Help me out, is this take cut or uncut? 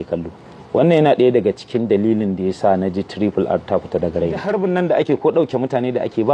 cut